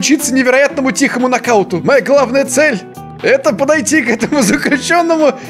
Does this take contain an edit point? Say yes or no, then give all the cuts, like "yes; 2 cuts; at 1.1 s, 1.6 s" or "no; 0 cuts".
no; 0 cuts